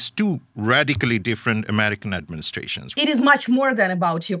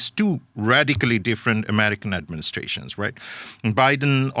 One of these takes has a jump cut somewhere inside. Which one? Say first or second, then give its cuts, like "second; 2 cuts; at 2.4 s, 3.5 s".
first; 1 cut; at 2.8 s